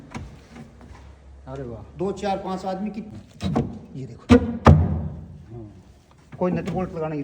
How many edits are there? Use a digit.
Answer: 1